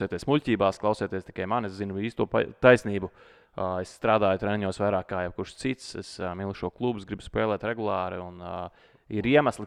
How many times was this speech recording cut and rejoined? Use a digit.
0